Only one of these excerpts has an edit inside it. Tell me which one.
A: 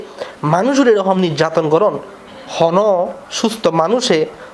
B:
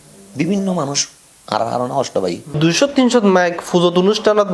B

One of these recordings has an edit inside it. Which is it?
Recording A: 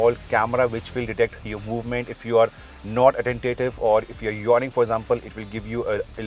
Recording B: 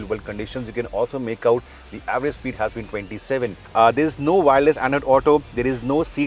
B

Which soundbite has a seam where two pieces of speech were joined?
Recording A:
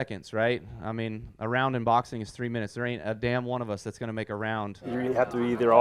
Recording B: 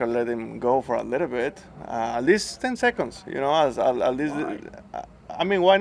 A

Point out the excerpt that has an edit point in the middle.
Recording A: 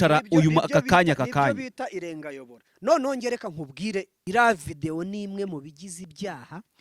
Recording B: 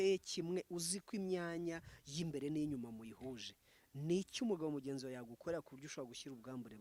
A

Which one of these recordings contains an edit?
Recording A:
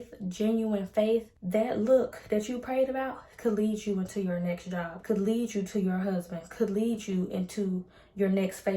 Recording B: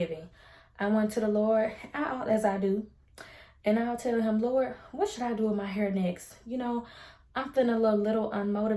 A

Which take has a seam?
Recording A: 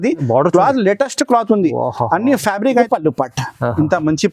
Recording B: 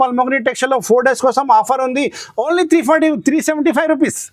A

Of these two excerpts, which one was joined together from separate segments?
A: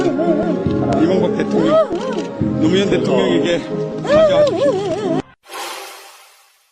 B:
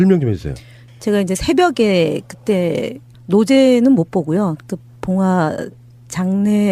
A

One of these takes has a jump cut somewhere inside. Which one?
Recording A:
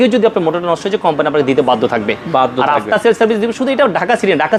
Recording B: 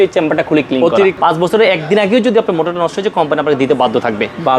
B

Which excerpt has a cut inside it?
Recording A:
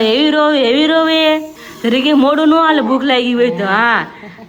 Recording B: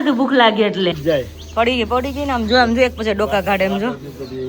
B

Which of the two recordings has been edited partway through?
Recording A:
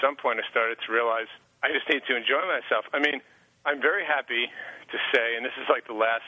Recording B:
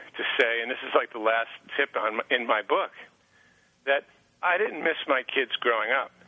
A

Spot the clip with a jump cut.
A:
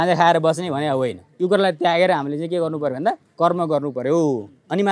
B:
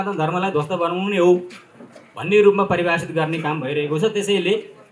A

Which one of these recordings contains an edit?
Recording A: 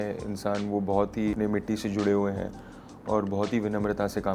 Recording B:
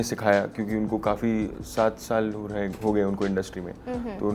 A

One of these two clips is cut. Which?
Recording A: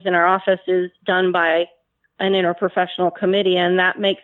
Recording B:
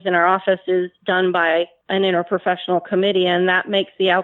B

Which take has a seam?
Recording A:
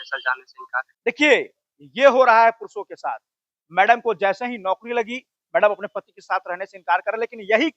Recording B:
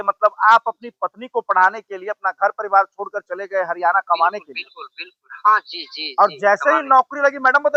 A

